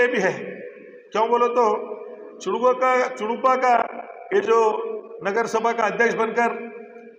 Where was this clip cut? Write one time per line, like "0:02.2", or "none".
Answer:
none